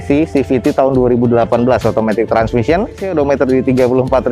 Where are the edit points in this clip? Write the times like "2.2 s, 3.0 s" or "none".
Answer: 3.1 s